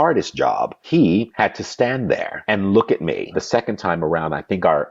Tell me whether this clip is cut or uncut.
cut